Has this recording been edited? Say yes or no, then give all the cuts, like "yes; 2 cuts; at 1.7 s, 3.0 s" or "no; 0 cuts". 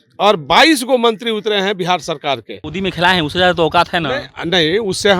yes; 1 cut; at 2.6 s